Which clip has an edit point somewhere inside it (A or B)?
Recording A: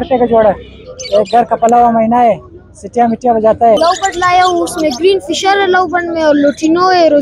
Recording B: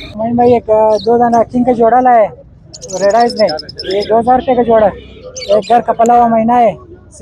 A